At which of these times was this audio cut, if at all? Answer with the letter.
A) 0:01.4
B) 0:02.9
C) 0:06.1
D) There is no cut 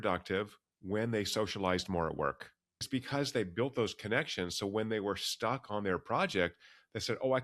B